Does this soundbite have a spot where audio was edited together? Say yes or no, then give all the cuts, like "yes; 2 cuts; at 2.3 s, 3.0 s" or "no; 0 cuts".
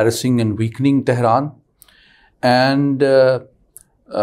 no; 0 cuts